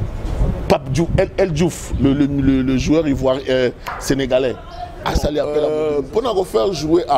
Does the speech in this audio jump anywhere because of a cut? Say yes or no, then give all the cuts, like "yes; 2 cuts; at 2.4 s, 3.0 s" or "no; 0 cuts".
yes; 1 cut; at 5.6 s